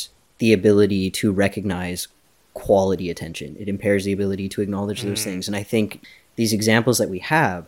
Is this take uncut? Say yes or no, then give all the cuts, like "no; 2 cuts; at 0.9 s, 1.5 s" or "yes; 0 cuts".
no; 1 cut; at 6.0 s